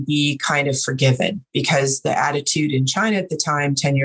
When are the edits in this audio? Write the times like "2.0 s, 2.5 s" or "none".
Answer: none